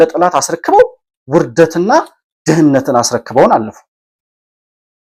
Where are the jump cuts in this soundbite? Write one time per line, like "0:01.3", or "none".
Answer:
none

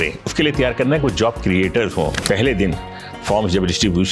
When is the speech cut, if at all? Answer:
0:02.2

